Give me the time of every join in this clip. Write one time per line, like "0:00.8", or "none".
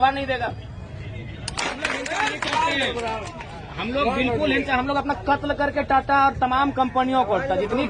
0:01.6